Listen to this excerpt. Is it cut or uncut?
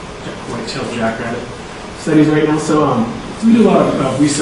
cut